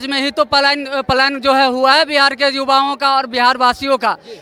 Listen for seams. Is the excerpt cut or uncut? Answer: uncut